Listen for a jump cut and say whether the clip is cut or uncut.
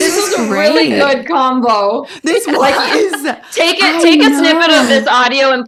uncut